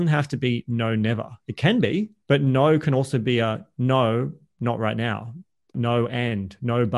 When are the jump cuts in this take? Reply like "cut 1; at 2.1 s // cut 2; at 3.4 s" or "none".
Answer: cut 1; at 2.1 s // cut 2; at 5.7 s